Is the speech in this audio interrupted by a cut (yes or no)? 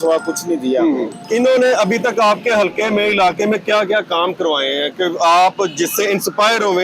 no